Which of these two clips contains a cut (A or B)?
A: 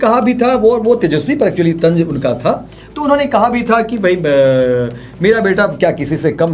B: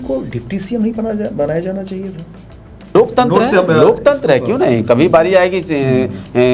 B